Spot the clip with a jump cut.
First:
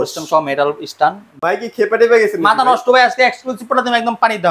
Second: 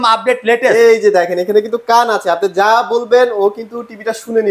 first; 1 cut; at 1.4 s

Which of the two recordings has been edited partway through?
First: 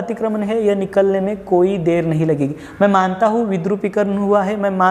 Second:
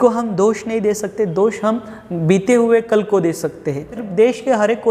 second; 1 cut; at 4.0 s

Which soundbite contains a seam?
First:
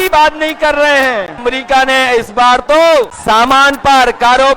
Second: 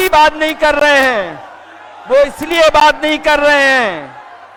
first; 2 cuts; at 1.4 s, 3.1 s

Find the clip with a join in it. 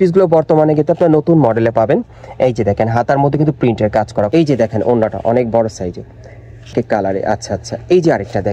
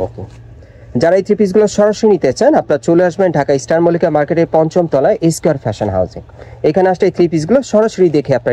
first; 2 cuts; at 4.3 s, 6.7 s

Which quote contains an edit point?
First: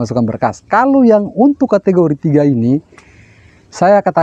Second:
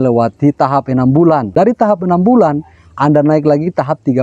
second; 1 cut; at 1.5 s

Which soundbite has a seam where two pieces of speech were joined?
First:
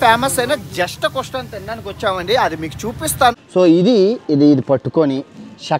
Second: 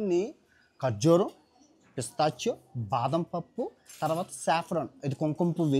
first; 1 cut; at 3.4 s

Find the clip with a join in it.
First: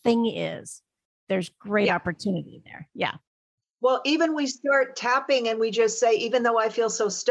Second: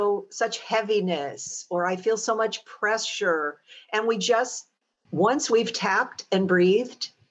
second; 1 cut; at 5.0 s

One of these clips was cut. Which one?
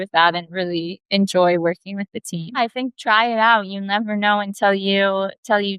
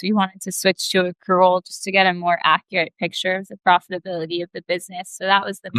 first; 1 cut; at 2.6 s

